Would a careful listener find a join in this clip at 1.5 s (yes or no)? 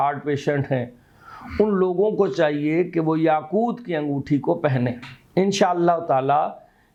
no